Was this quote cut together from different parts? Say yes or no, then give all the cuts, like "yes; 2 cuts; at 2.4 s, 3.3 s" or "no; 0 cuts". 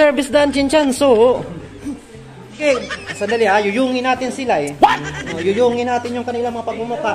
yes; 1 cut; at 2.6 s